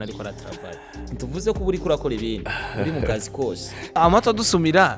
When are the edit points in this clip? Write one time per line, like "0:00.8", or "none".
0:04.0